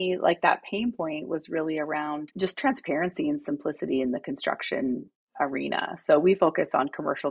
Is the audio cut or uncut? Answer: cut